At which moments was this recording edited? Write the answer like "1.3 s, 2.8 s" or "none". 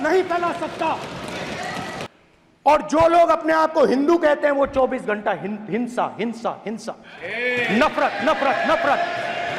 2.1 s